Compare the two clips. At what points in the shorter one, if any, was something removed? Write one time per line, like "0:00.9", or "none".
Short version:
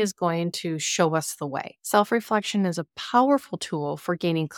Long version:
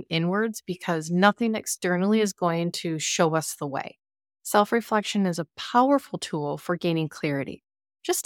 0:01.7